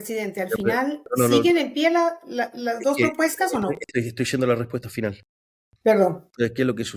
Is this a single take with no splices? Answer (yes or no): yes